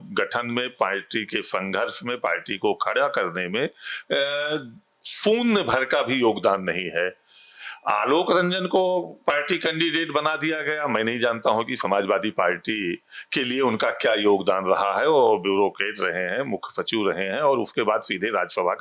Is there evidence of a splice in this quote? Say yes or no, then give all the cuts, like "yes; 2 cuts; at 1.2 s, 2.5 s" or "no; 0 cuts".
no; 0 cuts